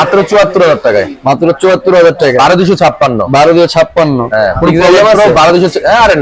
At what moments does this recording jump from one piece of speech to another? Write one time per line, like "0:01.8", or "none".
none